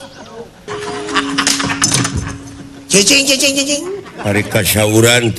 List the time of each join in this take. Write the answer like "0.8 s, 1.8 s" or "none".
4.1 s